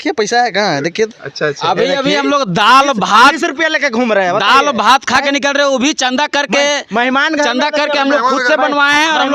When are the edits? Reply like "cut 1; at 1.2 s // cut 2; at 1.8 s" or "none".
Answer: none